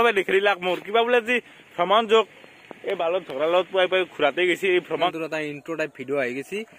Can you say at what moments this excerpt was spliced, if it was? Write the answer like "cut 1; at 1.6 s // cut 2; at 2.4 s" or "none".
cut 1; at 5.1 s